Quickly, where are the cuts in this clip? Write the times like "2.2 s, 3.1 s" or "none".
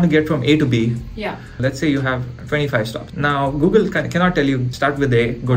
1.5 s, 3.0 s, 4.7 s

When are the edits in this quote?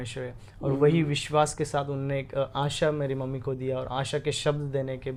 none

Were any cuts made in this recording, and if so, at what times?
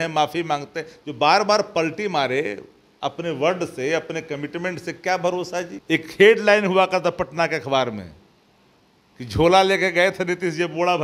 5.8 s

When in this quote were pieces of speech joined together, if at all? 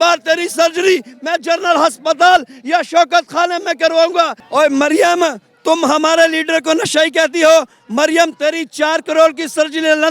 4.4 s

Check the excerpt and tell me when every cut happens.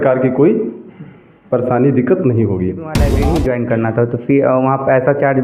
3.0 s

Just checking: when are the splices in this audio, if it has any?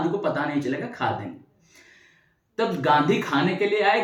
none

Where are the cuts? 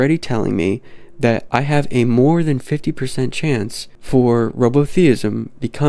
none

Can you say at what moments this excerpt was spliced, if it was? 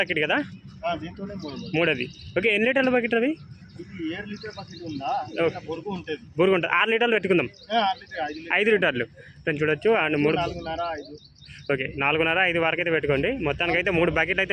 none

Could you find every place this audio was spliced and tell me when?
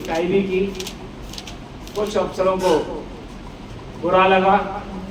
none

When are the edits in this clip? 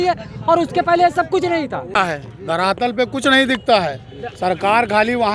1.9 s

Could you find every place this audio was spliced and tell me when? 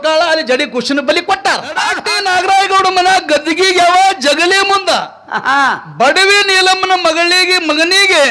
1.9 s

